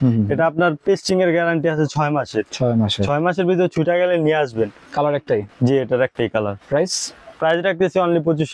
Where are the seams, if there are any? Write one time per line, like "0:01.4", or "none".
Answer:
0:04.8